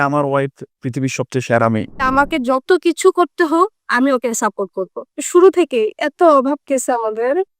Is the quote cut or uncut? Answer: cut